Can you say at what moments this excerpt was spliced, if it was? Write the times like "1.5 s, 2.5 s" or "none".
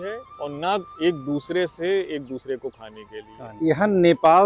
3.5 s